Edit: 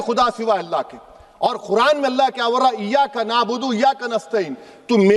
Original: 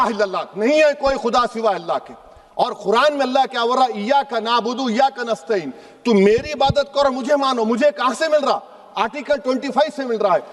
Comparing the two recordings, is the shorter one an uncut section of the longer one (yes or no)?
yes